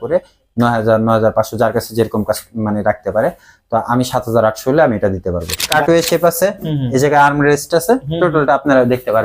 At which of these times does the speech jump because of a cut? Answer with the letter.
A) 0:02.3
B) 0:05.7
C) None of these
B